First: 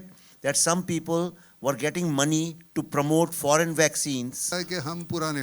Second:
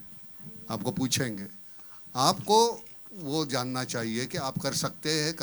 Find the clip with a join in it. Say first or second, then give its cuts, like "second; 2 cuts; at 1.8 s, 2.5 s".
first; 1 cut; at 4.5 s